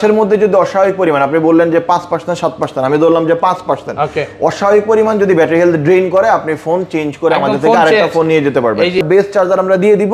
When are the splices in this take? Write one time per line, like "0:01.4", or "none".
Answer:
none